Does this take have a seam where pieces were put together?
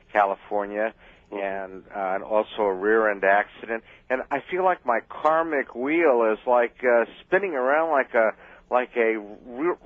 yes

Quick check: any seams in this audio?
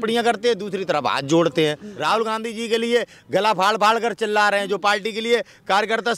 yes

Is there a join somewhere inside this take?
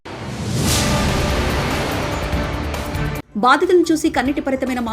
no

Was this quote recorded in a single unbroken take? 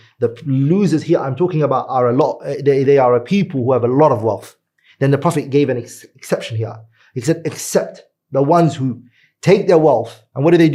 yes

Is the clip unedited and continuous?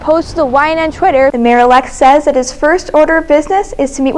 no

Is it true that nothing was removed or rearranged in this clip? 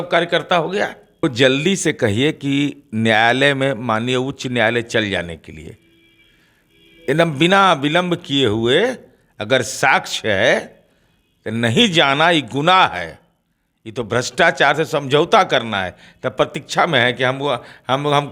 no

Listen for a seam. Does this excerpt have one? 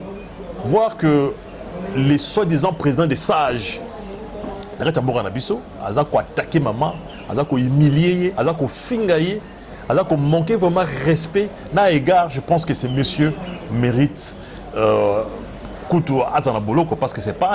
no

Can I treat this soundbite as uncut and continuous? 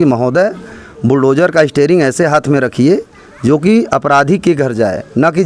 yes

